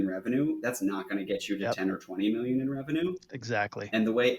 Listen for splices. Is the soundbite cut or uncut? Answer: uncut